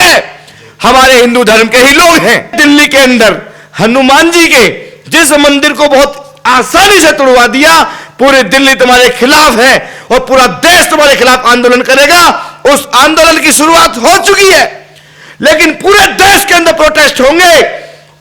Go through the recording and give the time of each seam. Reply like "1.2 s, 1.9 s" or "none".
2.6 s